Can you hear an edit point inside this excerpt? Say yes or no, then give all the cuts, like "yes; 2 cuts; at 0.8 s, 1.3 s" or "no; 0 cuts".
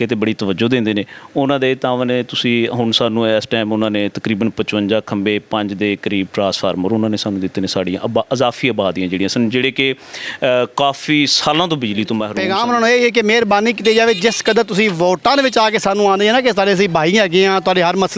yes; 1 cut; at 12.4 s